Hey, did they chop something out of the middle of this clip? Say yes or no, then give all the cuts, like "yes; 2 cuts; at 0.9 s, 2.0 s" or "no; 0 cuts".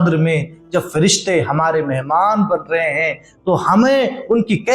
no; 0 cuts